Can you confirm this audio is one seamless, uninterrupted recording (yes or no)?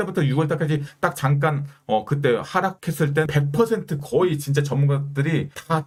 yes